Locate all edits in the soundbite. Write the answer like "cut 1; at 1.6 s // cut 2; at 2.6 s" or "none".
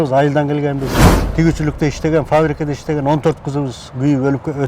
cut 1; at 0.9 s